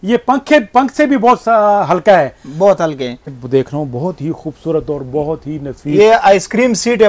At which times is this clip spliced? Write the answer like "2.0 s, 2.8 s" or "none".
3.3 s